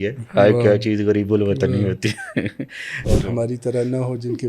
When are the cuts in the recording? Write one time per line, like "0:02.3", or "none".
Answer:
0:02.9